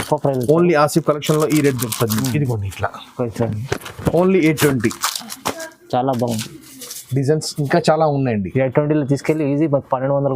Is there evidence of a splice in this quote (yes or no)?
no